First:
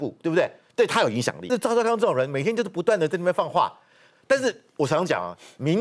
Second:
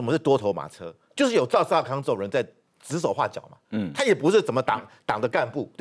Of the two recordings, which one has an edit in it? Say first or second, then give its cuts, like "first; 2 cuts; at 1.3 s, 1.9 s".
first; 1 cut; at 1.5 s